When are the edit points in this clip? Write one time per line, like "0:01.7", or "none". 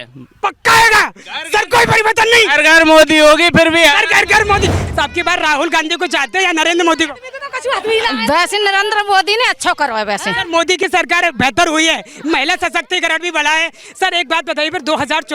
0:04.8